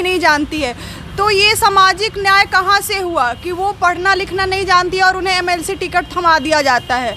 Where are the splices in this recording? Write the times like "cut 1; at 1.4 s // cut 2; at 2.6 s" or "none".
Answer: none